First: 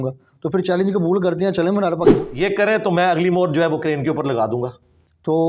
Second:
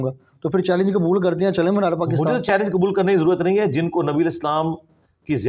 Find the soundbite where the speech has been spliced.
first; 1 cut; at 2.1 s

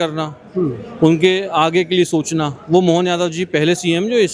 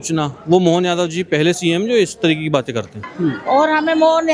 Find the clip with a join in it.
second; 1 cut; at 3.0 s

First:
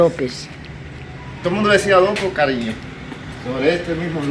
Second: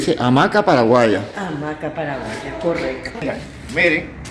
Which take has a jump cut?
second; 1 cut; at 3.1 s

